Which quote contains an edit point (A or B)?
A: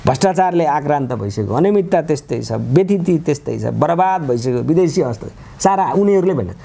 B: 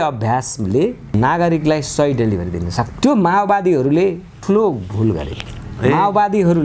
B